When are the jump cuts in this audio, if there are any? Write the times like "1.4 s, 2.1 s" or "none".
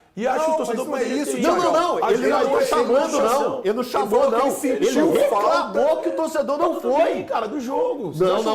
none

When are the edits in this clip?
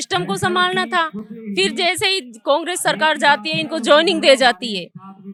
none

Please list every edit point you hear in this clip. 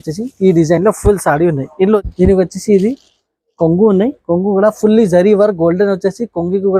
2.0 s

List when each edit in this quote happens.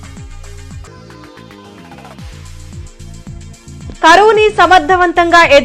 0.8 s, 3.5 s

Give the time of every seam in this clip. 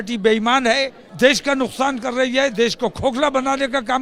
1.0 s

